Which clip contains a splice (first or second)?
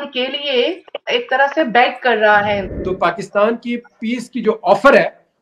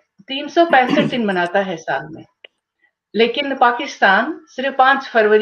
first